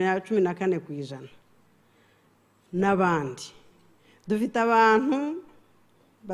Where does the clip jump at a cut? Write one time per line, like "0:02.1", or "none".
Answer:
none